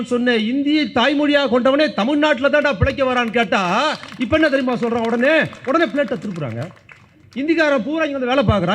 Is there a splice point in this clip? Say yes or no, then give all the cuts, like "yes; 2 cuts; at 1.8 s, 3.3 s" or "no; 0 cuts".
no; 0 cuts